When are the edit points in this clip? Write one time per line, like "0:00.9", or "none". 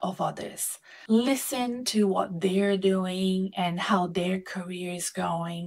none